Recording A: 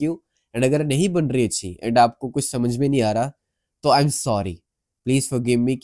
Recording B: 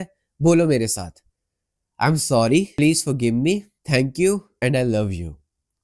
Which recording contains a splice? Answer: B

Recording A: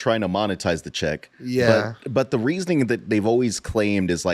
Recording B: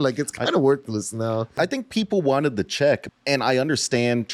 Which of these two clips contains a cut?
B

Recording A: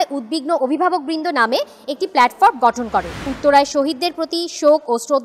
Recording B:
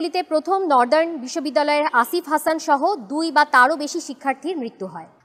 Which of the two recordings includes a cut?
A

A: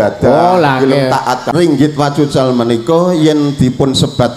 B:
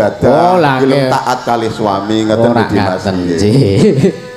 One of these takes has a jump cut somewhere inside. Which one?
A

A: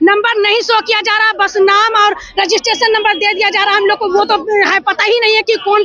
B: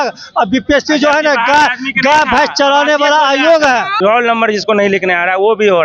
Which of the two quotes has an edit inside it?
B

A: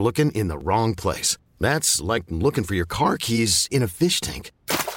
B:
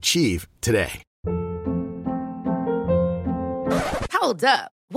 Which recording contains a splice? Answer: B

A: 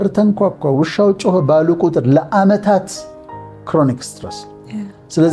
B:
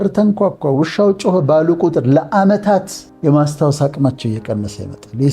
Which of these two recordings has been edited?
B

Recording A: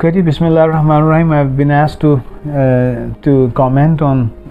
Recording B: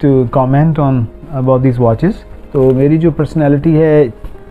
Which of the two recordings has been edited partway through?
B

